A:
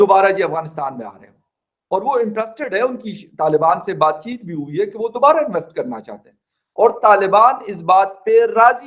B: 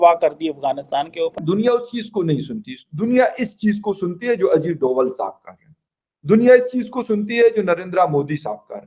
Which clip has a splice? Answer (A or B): B